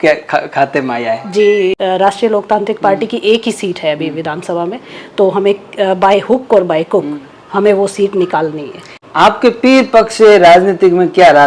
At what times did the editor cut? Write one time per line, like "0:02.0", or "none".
0:01.7
0:09.0